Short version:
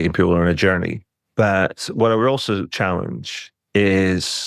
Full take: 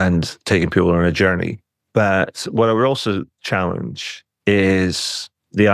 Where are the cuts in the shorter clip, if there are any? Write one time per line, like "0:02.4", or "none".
0:02.7